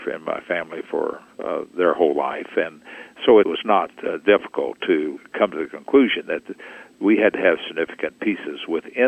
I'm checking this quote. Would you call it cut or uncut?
cut